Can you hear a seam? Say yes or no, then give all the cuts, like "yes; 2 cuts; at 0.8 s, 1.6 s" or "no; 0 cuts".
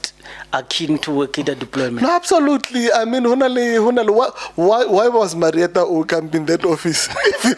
no; 0 cuts